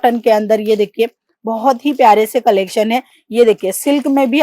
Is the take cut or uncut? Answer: uncut